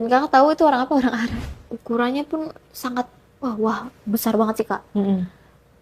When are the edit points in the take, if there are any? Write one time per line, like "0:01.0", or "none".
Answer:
0:01.4